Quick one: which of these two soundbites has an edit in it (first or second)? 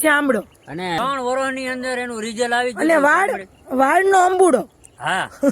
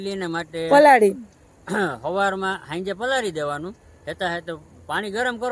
first